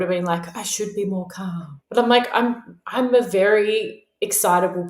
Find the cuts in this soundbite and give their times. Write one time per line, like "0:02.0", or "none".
0:01.8